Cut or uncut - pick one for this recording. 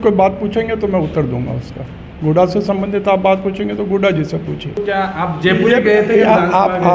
cut